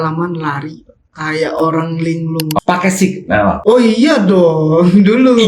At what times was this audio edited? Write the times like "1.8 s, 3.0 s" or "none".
2.6 s